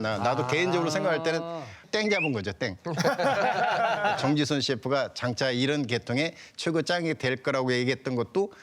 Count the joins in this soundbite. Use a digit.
1